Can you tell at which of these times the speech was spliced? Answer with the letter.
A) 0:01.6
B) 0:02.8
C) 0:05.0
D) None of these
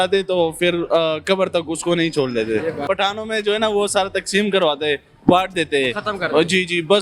B